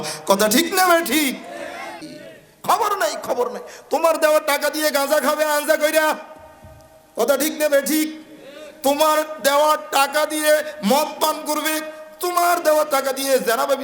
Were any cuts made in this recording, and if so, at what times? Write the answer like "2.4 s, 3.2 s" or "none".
1.9 s